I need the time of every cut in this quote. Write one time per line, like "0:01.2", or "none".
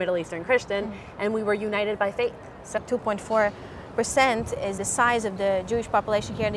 0:02.8
0:04.8